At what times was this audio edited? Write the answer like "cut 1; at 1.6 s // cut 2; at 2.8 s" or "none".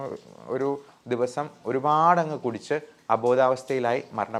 none